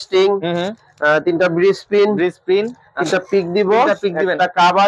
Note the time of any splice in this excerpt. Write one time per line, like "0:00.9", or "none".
none